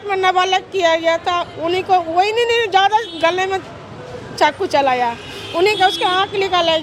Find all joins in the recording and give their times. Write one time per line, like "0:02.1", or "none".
none